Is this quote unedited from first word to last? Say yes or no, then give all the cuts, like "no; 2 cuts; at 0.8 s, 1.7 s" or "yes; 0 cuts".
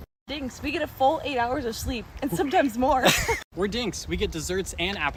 yes; 0 cuts